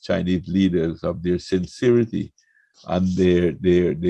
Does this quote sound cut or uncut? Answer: uncut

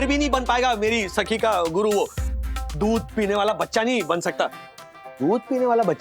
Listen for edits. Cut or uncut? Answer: cut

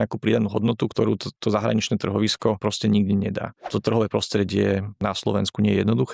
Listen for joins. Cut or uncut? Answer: cut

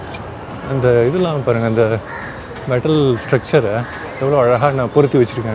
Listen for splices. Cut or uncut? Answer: uncut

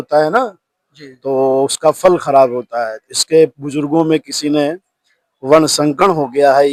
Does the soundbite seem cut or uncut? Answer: uncut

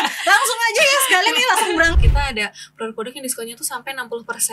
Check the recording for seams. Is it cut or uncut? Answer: cut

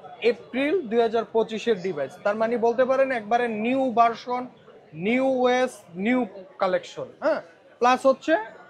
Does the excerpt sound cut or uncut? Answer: uncut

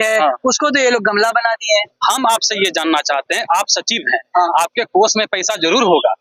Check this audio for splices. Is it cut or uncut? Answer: cut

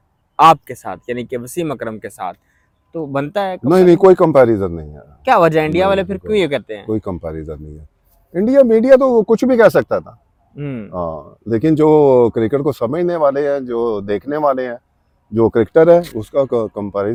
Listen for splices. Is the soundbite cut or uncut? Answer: uncut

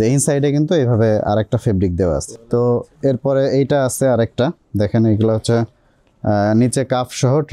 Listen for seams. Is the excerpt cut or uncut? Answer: cut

